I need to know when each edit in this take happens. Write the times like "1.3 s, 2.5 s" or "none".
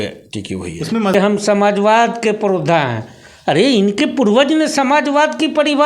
1.1 s